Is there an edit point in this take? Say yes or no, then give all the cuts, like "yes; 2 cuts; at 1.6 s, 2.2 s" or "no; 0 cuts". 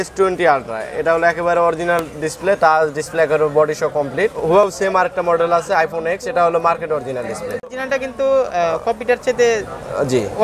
yes; 2 cuts; at 4.7 s, 7.7 s